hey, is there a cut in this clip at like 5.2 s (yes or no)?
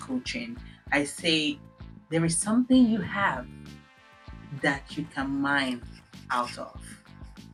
no